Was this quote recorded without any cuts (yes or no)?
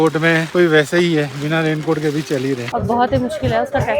no